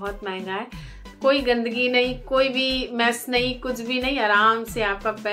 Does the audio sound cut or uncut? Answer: cut